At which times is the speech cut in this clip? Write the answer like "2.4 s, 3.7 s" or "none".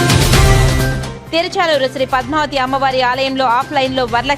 1.0 s